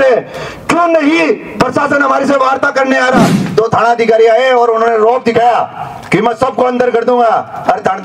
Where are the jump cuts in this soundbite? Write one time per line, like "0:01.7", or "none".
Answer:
0:03.4